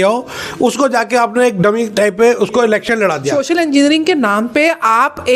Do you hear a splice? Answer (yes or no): yes